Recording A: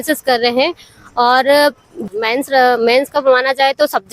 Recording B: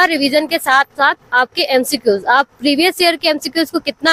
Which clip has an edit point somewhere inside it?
A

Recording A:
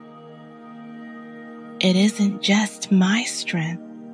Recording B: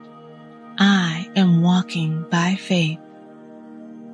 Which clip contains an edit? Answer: A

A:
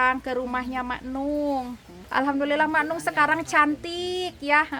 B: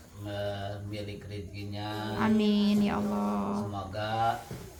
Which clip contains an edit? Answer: A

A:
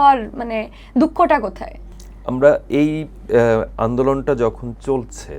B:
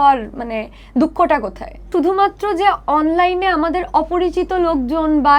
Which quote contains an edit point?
B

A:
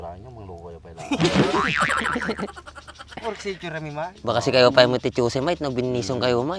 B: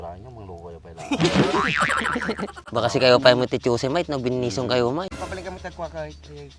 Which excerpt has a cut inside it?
B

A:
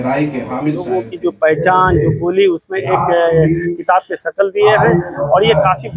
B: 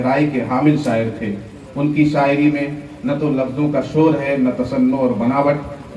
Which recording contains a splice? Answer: A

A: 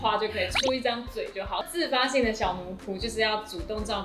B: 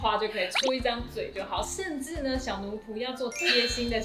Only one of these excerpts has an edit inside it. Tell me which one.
A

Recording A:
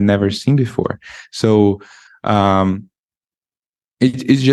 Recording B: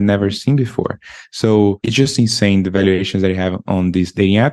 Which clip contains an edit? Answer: B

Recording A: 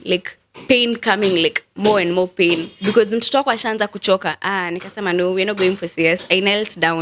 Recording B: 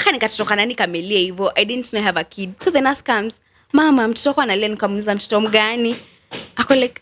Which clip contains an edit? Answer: A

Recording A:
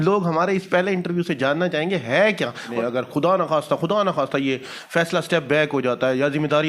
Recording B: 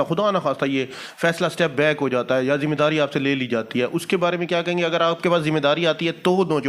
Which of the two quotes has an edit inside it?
A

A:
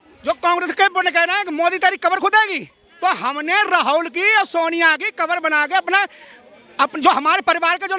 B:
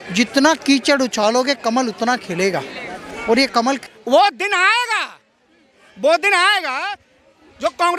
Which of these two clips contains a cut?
B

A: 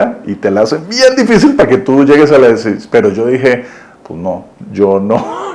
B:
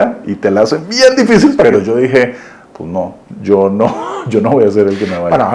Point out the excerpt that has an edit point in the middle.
B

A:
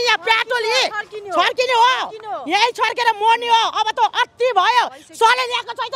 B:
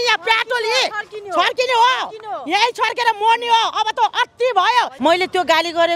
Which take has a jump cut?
B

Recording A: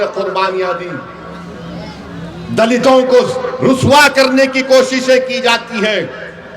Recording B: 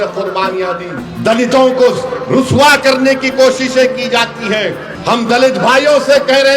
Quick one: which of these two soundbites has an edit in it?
B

